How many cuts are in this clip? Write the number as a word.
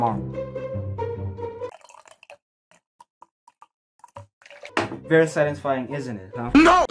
zero